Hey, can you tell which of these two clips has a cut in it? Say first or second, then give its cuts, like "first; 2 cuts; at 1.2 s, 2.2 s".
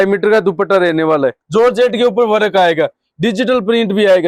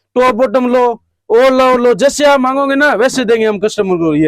first; 1 cut; at 1.4 s